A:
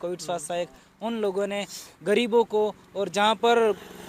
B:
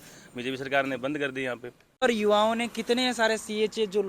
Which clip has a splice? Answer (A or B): B